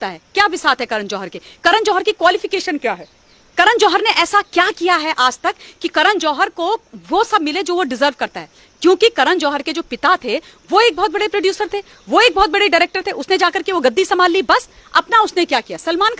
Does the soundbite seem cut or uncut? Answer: uncut